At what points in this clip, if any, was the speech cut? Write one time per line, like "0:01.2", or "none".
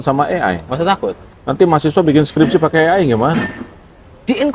none